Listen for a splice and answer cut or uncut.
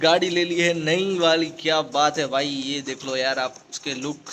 uncut